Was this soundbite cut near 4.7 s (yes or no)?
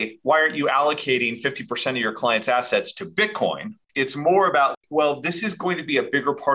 yes